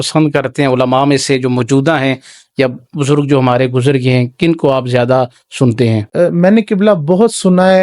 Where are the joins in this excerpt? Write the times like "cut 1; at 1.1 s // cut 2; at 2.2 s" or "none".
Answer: cut 1; at 6.1 s